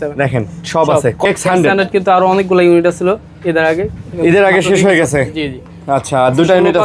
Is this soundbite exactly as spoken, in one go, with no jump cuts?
no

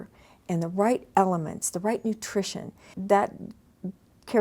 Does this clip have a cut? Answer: yes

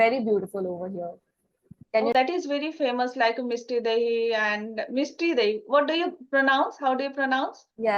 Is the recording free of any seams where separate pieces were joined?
no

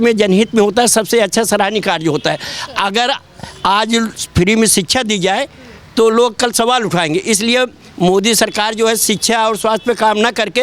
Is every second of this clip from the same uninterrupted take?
yes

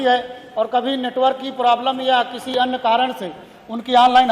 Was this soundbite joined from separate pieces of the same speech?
no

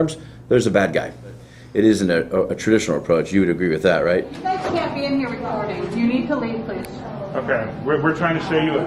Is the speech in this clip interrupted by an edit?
yes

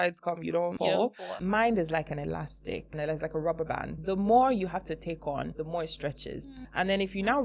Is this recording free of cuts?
no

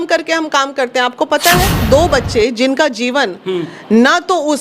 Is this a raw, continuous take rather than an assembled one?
no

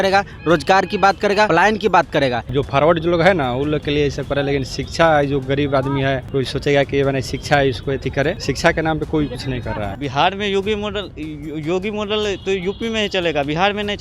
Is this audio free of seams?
no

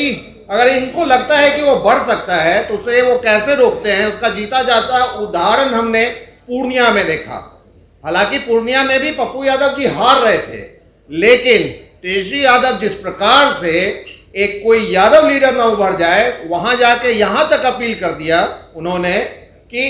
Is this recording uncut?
yes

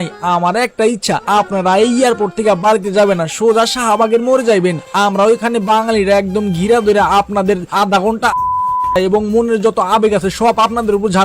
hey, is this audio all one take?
yes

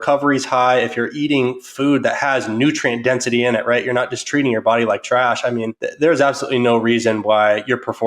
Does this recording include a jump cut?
yes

